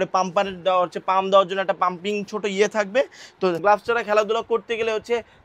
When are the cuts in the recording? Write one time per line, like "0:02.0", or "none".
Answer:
0:03.6